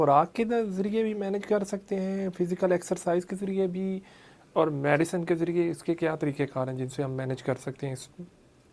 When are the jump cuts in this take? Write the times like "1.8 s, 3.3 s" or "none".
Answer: none

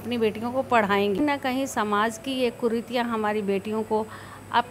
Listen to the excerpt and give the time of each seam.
1.2 s

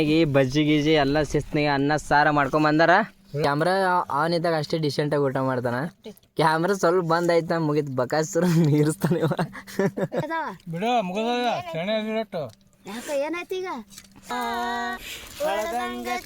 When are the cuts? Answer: 3.4 s, 10.3 s, 14.3 s

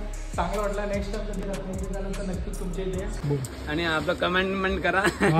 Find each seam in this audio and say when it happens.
3.2 s

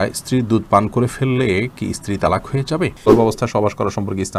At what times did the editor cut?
3.0 s

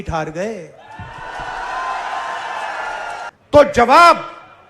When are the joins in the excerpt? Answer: 3.3 s

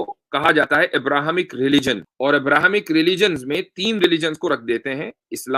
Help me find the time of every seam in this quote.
2.1 s

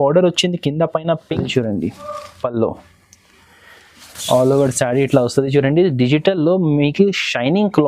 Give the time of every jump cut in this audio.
1.5 s

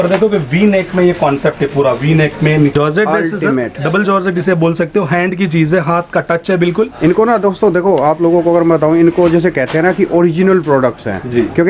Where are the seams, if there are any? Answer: 2.7 s

